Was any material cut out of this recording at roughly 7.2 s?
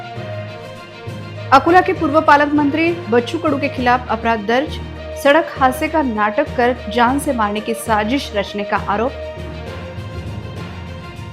no; 1 cut; at 0.9 s

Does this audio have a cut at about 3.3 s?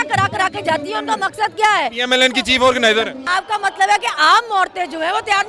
yes; 1 cut; at 3.3 s

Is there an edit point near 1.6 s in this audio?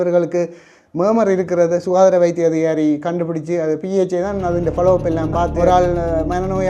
no; 1 cut; at 5.5 s

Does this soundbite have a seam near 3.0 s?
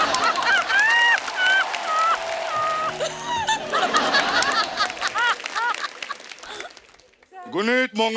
yes; 1 cut; at 3.0 s

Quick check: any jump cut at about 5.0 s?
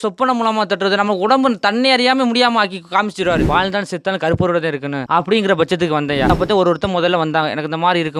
yes; 3 cuts; at 3.4 s, 5.0 s, 6.3 s

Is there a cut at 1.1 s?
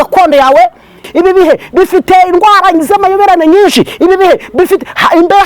yes; 1 cut; at 1.1 s

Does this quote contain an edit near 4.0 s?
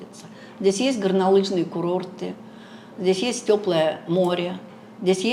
no; 0 cuts

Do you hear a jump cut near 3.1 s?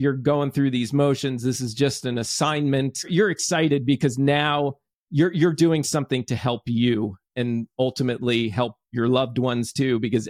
yes; 2 cuts; at 3.1 s, 7.3 s

